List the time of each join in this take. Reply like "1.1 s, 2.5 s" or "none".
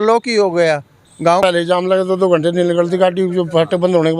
1.4 s